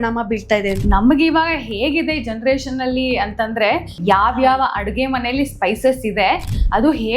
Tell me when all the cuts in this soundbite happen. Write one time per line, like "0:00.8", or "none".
0:00.8
0:04.0